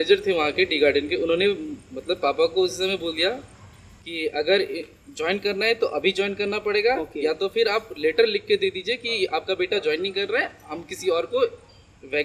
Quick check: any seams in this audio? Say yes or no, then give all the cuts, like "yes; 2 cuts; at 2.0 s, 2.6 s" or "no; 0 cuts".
no; 0 cuts